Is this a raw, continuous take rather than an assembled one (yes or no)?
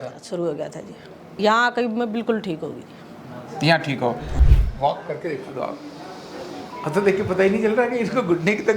no